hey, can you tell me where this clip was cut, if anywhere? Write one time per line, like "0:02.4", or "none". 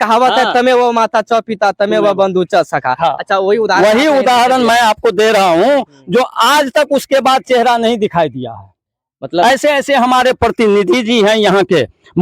none